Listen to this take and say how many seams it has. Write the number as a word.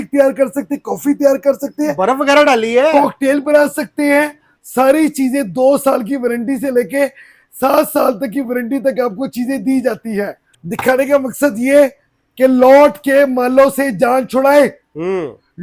two